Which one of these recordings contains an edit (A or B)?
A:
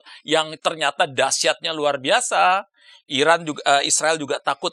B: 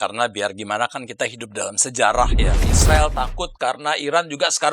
B